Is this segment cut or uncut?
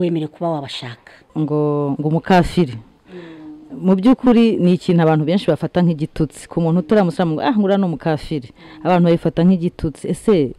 cut